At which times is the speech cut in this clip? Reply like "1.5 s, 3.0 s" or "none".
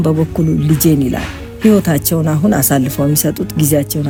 none